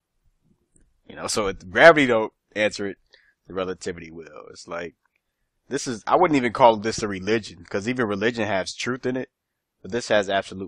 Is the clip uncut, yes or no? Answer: yes